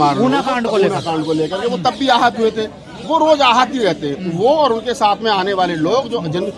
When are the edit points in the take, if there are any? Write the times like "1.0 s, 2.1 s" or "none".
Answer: none